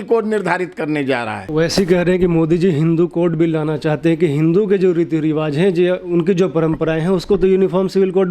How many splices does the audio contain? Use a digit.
1